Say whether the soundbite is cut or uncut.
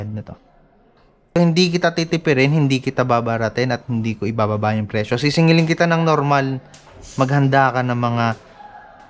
cut